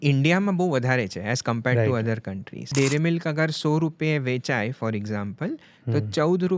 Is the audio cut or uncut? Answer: cut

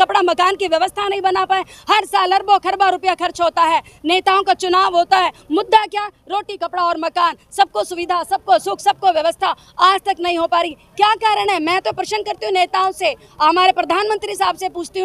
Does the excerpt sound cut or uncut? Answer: uncut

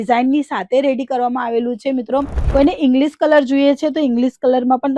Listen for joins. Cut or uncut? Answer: cut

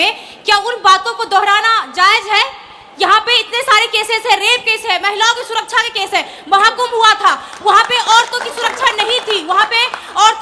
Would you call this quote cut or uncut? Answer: uncut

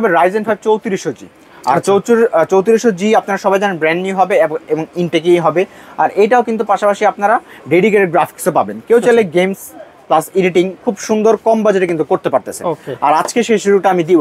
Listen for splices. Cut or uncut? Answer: uncut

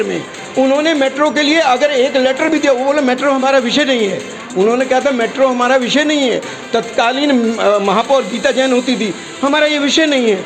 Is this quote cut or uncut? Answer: uncut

